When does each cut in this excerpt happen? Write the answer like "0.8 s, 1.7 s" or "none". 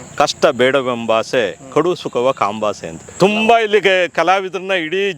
3.0 s